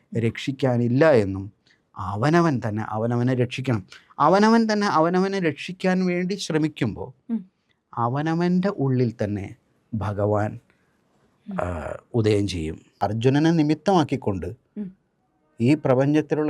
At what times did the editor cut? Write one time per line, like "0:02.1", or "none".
0:12.8

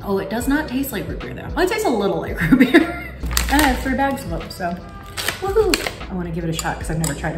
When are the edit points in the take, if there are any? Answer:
0:03.2
0:06.0

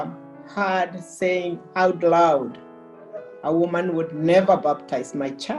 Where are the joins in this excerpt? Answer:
none

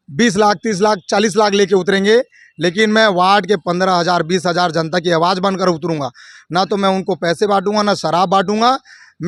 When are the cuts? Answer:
none

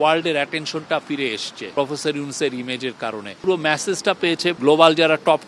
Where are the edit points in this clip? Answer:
0:01.5
0:03.3
0:04.6

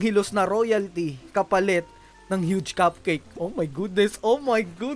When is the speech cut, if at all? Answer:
none

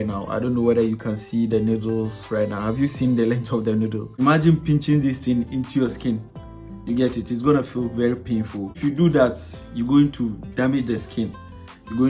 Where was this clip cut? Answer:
0:04.0
0:08.8

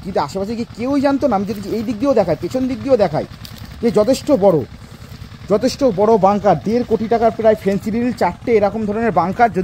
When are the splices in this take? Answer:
none

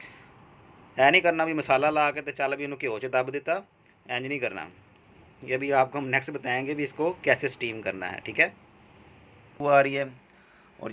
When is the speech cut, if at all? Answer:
0:09.5

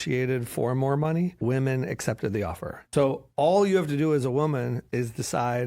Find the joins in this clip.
0:01.4
0:02.8

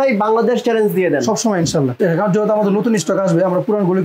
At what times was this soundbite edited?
0:01.9

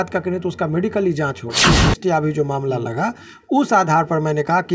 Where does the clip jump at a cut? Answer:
0:01.6

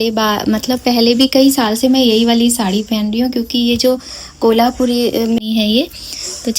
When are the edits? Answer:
0:05.4

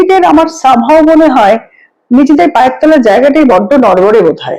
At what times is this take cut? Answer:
none

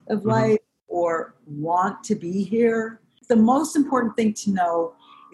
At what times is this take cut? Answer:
0:03.2

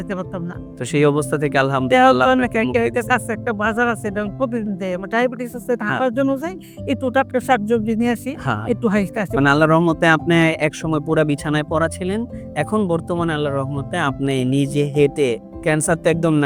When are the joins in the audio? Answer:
none

